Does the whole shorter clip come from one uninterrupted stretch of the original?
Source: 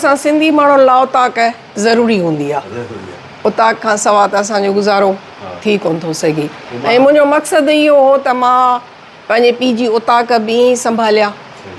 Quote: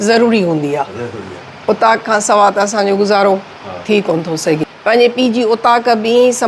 no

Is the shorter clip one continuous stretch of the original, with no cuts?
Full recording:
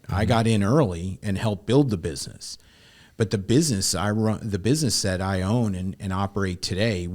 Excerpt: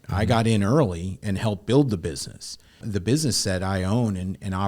no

